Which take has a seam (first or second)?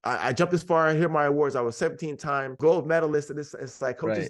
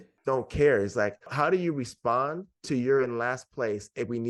first